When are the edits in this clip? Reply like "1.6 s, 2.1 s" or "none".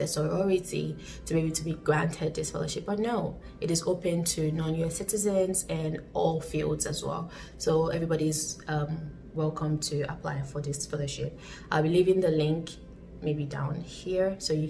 none